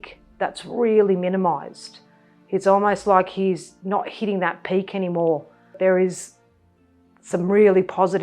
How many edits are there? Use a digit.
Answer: 1